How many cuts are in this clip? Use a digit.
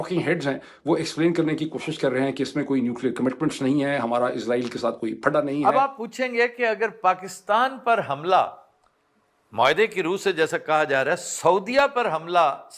1